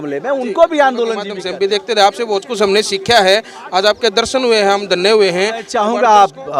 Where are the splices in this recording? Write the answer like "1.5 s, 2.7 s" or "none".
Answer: 1.4 s, 5.7 s